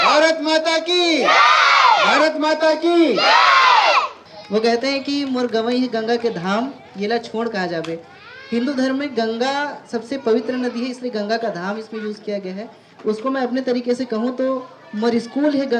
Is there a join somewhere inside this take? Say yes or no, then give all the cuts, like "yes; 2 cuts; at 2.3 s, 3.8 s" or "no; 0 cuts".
yes; 1 cut; at 4.2 s